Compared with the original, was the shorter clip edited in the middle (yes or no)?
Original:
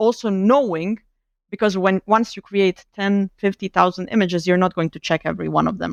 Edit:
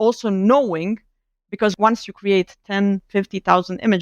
yes